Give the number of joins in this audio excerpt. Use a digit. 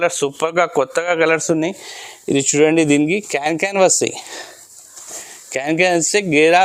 0